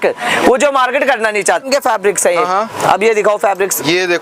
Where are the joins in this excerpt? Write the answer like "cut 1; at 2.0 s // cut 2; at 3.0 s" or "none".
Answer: cut 1; at 1.6 s